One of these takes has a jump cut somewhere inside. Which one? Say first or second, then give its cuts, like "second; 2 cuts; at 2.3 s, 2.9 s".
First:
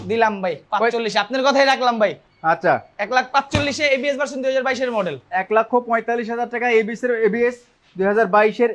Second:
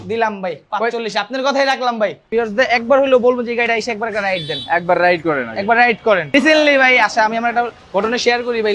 second; 2 cuts; at 2.2 s, 6.3 s